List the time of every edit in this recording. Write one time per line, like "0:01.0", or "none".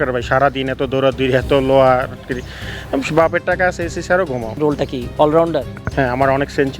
0:04.6
0:05.8